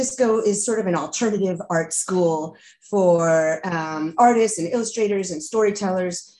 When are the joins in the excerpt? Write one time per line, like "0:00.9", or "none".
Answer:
none